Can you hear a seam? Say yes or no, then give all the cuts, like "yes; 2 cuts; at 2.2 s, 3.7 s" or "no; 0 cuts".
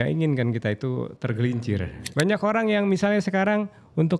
yes; 1 cut; at 2.0 s